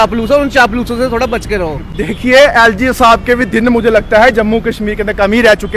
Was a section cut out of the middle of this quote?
no; 0 cuts

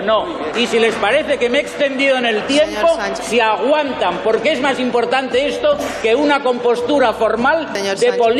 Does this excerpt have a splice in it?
no; 0 cuts

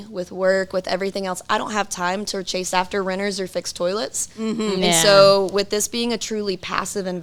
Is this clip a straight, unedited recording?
yes; 0 cuts

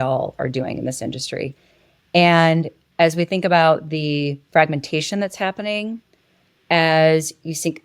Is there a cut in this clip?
yes; 1 cut; at 4.4 s

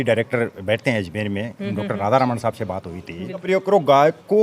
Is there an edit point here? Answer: yes; 1 cut; at 3.4 s

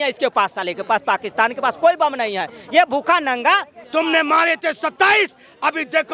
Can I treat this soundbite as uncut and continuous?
no; 1 cut; at 3.7 s

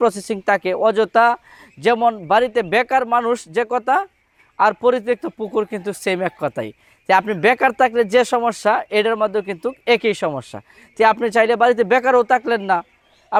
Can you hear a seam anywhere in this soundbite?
no; 0 cuts

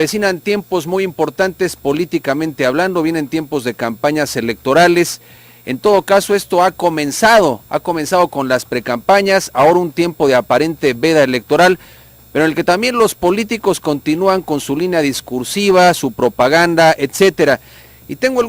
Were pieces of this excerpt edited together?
yes; 1 cut; at 17.4 s

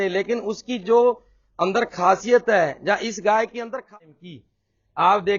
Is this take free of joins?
no; 1 cut; at 4.0 s

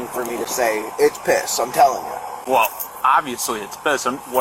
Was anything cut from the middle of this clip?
no; 0 cuts

